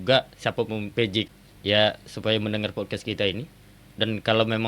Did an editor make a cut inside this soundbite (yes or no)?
yes